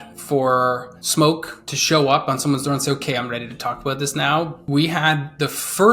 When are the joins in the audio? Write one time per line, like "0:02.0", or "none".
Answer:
0:00.9
0:04.6

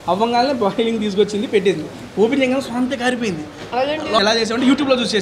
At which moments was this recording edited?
0:04.2

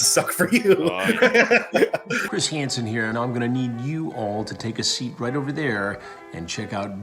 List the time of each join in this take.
0:02.2

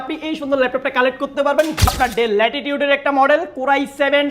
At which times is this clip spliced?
0:01.9

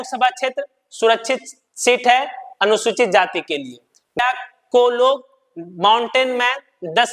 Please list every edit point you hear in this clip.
0:04.2

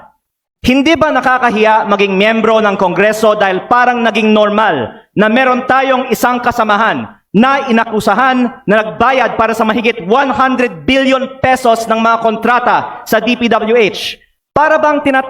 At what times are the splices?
none

